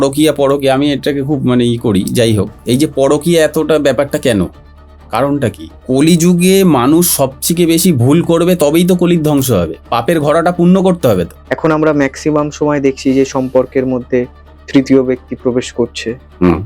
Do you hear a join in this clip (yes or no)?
yes